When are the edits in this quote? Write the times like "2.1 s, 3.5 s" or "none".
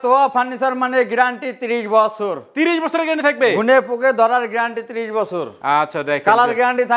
none